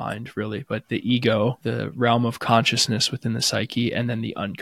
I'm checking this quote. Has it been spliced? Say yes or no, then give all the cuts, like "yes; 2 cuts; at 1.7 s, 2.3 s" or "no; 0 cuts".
yes; 1 cut; at 1.6 s